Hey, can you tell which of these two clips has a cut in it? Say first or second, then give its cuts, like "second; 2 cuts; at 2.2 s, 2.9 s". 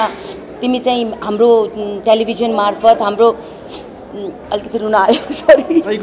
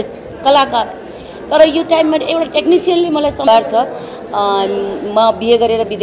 second; 1 cut; at 3.5 s